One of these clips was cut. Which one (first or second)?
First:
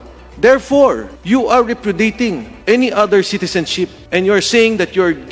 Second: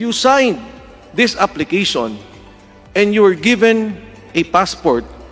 first